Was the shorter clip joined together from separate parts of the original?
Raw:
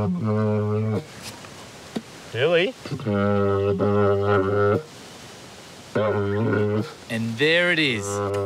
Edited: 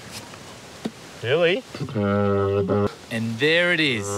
yes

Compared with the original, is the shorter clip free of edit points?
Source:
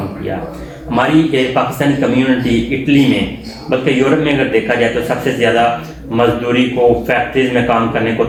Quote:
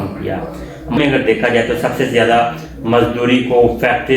no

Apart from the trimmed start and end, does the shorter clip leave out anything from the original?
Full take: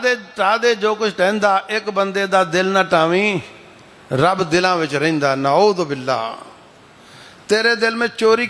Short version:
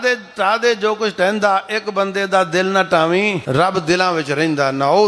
yes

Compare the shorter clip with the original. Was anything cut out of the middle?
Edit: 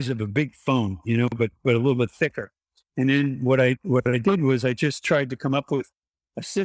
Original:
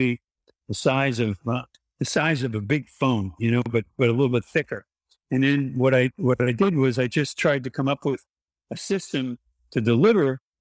no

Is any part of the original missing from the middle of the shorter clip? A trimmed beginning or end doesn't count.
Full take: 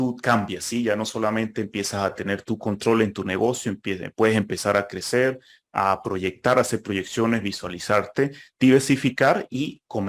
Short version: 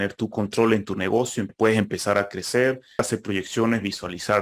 yes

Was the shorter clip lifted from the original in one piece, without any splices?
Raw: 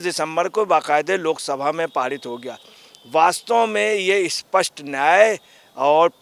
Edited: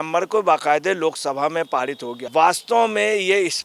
no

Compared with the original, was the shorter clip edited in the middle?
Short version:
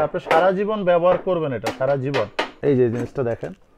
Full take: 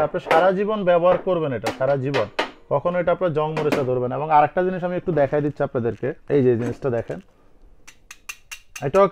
yes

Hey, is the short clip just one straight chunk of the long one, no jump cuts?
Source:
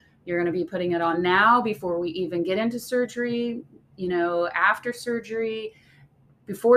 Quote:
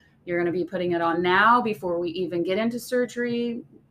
yes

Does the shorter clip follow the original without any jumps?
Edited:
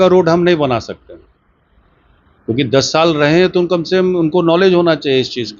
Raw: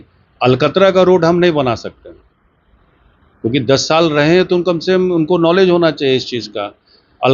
yes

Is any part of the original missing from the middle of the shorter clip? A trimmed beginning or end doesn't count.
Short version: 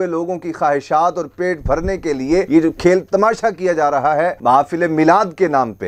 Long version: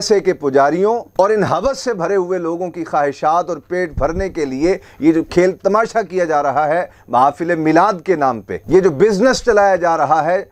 yes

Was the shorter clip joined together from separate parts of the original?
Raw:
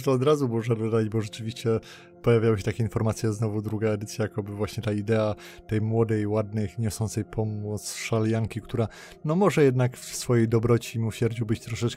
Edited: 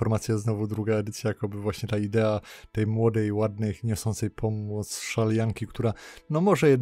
no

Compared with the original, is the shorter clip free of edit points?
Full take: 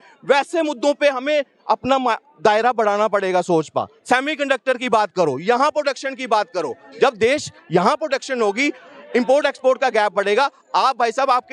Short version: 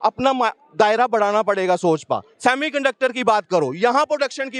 yes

